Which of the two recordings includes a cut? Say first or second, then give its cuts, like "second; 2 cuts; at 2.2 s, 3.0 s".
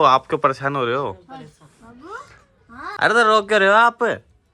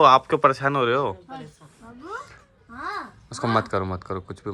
first; 1 cut; at 2.9 s